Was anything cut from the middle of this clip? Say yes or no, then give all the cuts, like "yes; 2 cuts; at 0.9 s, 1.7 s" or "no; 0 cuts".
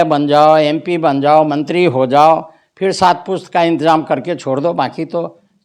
no; 0 cuts